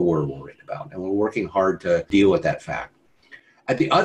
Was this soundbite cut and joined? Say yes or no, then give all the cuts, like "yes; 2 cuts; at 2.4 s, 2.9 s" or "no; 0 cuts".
yes; 1 cut; at 2.1 s